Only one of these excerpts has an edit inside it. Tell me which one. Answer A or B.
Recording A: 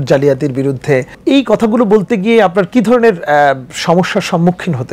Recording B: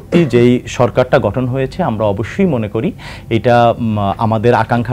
A